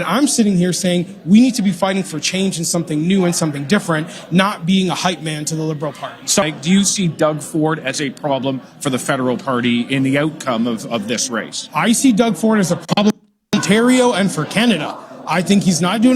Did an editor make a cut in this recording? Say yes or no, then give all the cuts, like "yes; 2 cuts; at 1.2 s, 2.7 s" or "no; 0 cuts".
yes; 1 cut; at 6.5 s